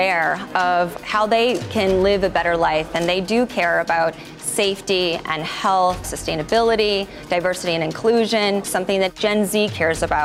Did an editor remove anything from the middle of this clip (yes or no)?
yes